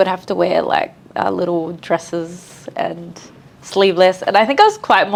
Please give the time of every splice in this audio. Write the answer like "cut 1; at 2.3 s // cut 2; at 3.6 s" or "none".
none